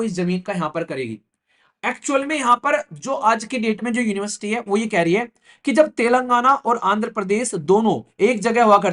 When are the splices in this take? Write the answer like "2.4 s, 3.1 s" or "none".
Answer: none